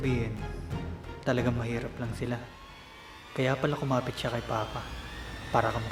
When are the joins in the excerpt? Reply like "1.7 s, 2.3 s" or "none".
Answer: none

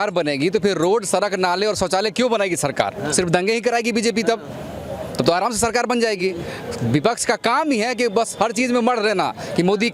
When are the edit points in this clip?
none

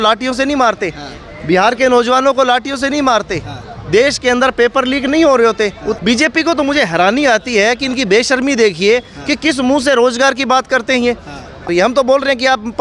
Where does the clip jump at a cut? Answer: 6.0 s, 11.7 s

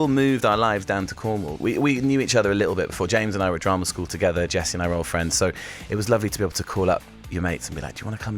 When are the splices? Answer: 1.5 s

